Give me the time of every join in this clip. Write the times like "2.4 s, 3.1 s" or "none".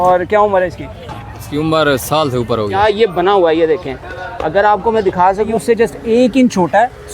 2.7 s, 5.5 s